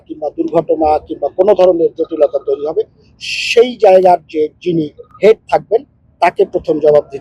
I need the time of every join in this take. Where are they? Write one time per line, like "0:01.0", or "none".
none

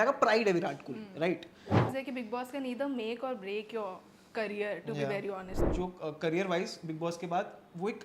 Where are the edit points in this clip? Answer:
0:01.9
0:05.6

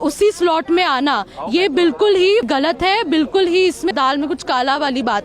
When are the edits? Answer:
0:02.5
0:03.9

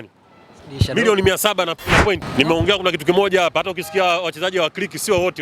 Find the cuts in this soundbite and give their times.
0:02.3

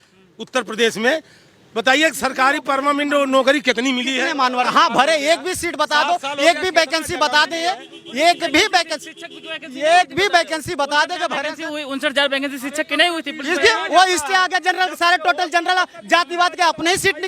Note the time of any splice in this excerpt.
0:04.7

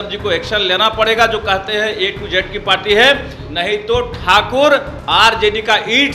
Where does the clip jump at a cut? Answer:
none

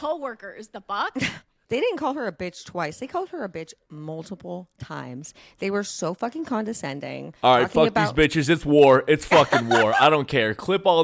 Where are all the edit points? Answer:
0:01.5

